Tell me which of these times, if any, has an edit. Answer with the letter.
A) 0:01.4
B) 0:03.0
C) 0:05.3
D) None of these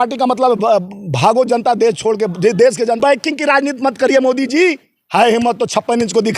B